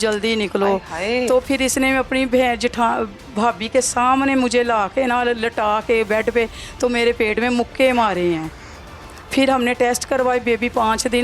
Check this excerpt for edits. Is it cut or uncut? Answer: uncut